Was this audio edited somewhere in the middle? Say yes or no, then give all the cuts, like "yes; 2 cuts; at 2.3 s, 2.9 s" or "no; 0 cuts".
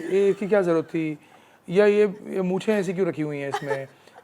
no; 0 cuts